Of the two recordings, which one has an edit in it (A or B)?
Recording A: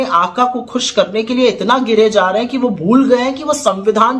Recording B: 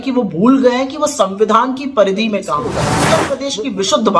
B